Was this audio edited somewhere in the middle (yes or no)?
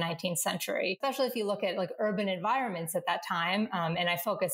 yes